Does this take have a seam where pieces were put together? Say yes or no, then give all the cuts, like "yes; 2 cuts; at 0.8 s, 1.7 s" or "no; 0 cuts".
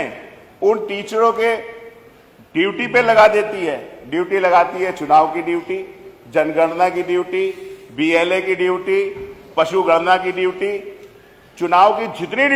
no; 0 cuts